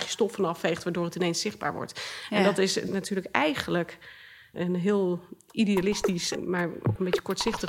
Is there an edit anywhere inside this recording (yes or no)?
yes